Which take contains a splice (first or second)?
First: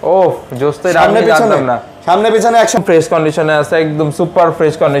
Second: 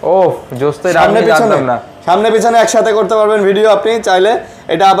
first